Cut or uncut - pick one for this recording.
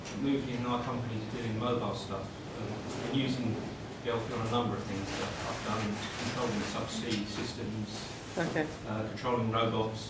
uncut